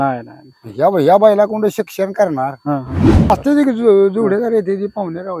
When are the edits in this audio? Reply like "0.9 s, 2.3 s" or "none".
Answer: 3.3 s